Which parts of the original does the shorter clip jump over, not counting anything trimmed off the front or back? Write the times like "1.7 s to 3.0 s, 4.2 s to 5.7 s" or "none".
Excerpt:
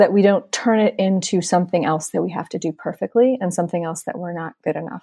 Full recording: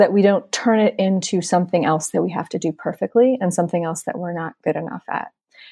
none